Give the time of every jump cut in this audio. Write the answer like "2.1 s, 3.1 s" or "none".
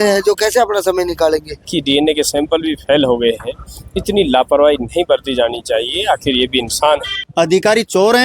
1.7 s, 7.2 s